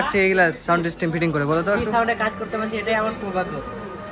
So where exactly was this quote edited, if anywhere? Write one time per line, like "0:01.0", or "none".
0:01.8